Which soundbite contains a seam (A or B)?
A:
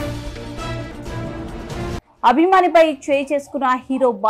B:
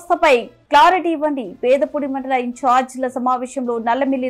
A